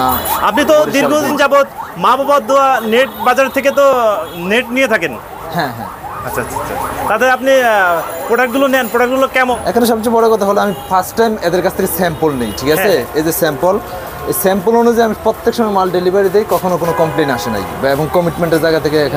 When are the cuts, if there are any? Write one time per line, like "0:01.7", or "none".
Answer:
0:01.3
0:09.6